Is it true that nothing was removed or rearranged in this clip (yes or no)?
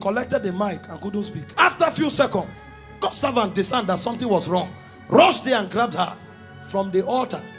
no